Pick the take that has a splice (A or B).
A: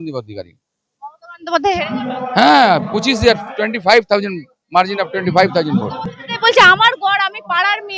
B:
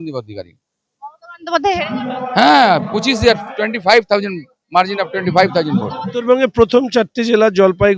B